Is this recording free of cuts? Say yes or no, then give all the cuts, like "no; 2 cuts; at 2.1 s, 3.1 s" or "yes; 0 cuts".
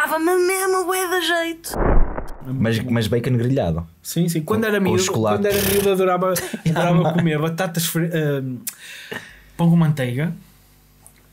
no; 1 cut; at 2.1 s